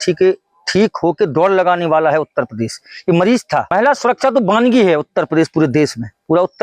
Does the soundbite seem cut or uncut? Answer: cut